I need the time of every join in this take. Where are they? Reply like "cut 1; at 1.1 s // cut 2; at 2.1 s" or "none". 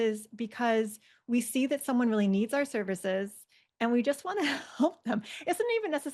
none